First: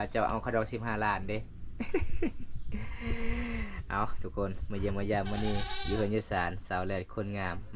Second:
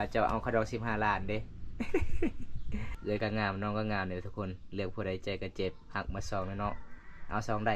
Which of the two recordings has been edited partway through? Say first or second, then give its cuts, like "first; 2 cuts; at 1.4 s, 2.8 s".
second; 1 cut; at 2.9 s